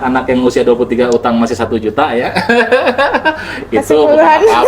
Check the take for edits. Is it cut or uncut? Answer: uncut